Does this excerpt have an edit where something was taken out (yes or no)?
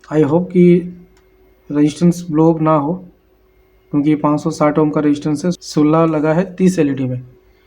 yes